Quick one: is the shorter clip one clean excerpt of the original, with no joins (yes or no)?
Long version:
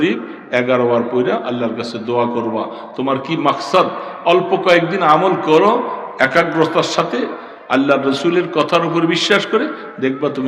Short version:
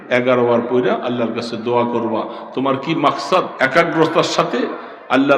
no